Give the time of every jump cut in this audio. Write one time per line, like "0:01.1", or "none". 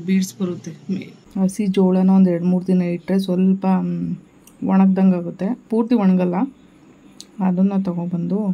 0:01.1

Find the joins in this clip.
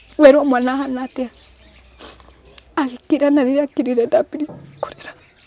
none

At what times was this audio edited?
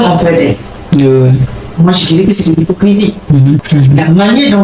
0:01.6
0:03.6

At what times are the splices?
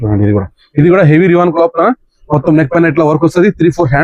none

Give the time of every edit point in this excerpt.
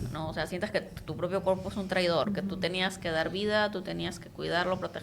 0:02.3

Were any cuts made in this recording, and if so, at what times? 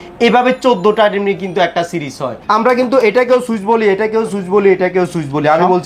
0:02.3

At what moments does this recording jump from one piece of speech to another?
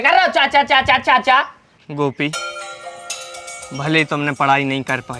0:01.5

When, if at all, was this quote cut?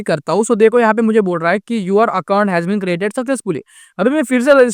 none

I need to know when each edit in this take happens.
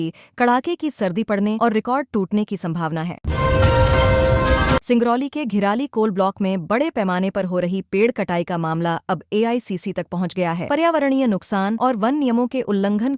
0:03.2
0:04.8

